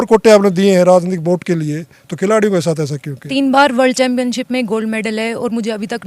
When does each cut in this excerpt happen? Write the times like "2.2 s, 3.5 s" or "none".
3.3 s